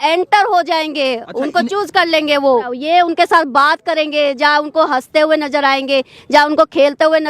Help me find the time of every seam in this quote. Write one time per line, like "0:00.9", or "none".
0:02.7